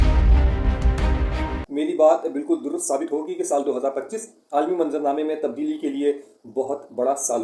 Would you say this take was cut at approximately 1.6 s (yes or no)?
yes